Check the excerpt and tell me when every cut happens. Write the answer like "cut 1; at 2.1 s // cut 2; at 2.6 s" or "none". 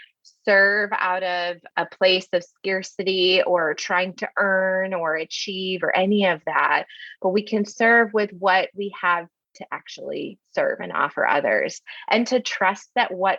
cut 1; at 1.6 s